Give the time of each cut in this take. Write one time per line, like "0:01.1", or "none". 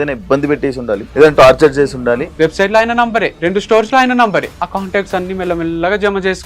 0:01.1
0:02.3
0:03.3
0:04.6